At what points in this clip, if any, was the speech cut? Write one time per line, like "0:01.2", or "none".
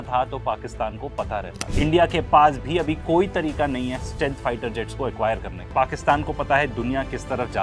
0:01.7
0:05.7